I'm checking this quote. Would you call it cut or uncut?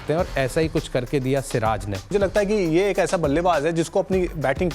cut